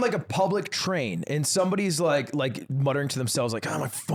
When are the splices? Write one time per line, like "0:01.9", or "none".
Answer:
none